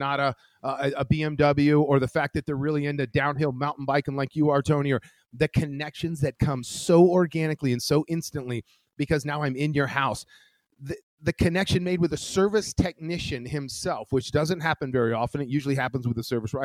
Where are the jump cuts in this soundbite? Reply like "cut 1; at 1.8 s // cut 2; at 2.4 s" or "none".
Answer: none